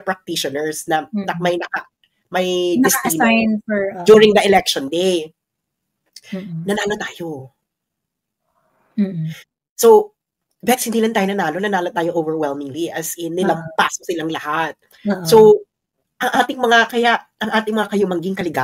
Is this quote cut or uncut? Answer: uncut